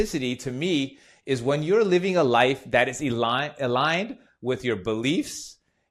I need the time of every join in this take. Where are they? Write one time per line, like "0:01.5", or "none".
none